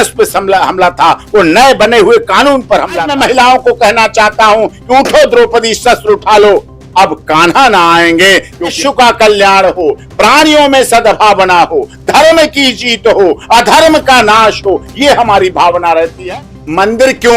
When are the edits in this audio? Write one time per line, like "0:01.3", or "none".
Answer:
0:03.1
0:08.7
0:16.2